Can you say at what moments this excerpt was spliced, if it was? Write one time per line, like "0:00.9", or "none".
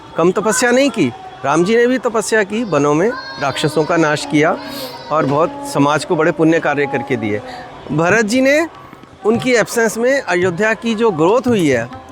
none